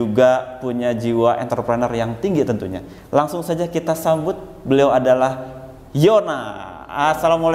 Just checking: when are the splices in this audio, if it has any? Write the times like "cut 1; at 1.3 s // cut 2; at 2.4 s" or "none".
none